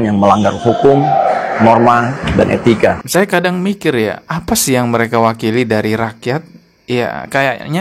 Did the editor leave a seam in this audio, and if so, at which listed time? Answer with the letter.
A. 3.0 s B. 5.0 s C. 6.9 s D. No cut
A